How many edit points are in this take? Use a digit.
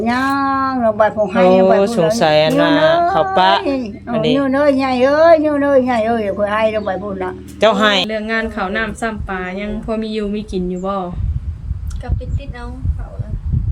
1